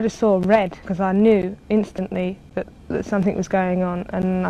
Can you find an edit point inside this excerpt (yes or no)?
no